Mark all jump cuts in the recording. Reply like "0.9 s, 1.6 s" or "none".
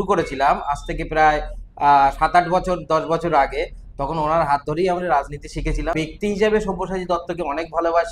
5.9 s